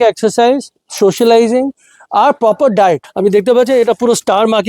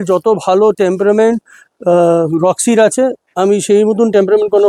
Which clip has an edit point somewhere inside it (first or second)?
first